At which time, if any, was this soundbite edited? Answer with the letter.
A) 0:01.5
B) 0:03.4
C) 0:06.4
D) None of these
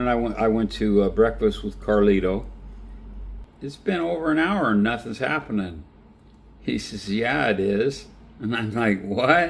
B